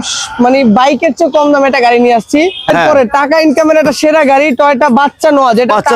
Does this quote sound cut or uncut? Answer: cut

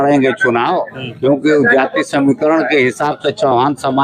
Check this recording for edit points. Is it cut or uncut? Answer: uncut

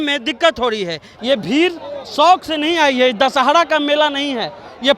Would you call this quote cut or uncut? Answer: cut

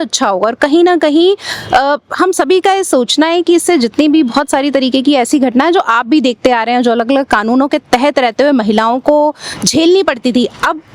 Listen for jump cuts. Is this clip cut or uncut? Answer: uncut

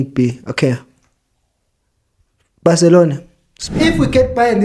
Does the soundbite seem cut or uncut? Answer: cut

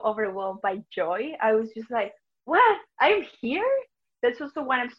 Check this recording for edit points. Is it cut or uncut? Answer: cut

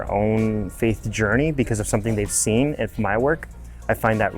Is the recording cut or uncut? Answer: uncut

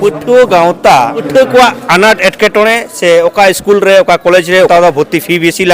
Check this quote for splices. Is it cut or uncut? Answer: cut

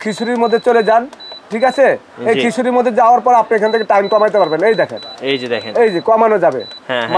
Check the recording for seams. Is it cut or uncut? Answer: uncut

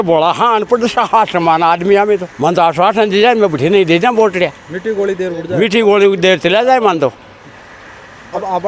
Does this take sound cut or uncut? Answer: uncut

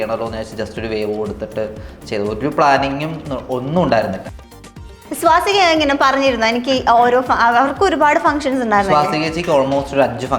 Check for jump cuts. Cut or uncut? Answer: cut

